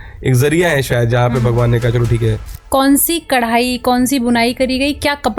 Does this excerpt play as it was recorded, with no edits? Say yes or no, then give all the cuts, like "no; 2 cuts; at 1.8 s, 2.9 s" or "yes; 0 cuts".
no; 1 cut; at 2.5 s